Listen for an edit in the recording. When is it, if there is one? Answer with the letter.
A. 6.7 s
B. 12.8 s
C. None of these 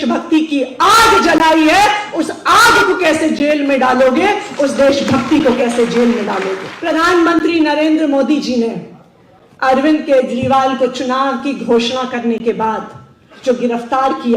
A